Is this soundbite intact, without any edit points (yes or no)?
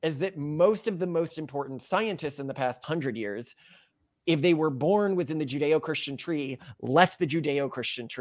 no